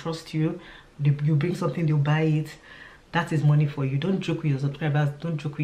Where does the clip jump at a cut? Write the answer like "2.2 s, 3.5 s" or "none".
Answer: none

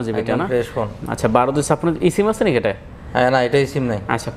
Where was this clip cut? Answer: none

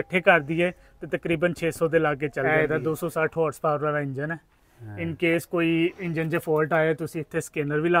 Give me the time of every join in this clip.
2.5 s

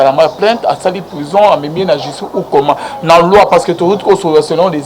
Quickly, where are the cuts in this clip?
none

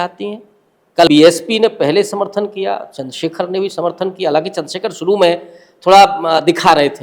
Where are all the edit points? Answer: 1.1 s

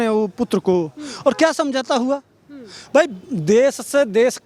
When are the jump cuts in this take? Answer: none

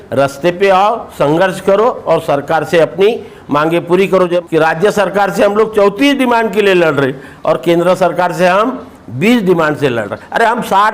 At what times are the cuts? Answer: 4.4 s

